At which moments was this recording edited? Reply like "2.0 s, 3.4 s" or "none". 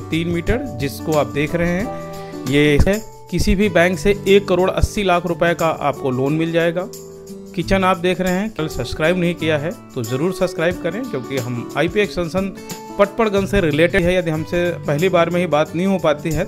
2.9 s, 8.6 s, 14.0 s

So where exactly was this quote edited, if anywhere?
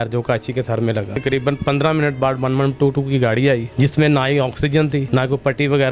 1.2 s, 3.7 s, 5.1 s

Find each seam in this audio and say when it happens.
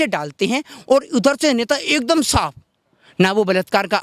none

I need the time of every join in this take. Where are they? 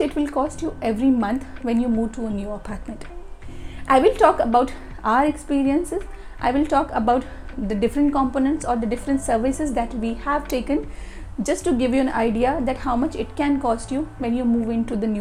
none

